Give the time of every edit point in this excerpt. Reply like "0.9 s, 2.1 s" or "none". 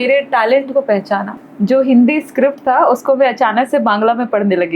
1.3 s